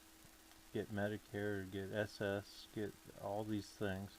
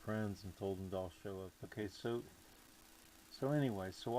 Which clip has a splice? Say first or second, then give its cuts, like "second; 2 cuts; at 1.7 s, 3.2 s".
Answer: second; 1 cut; at 1.6 s